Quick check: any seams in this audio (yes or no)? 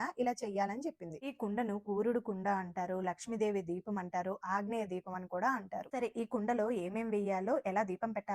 yes